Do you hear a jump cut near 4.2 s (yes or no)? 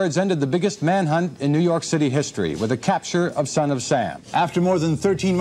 yes